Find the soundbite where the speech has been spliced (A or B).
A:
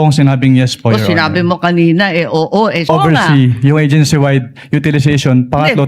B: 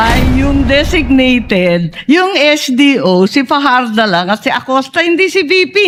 A